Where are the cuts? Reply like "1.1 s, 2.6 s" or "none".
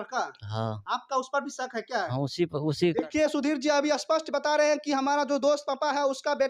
none